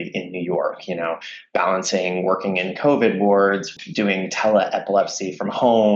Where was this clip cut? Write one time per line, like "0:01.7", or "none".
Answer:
0:03.7